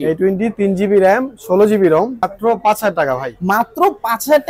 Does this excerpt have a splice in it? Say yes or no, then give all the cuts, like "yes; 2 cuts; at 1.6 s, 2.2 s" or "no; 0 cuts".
yes; 1 cut; at 2.2 s